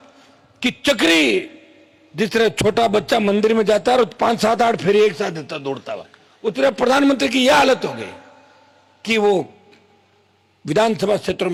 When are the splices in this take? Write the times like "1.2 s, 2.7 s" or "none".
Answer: none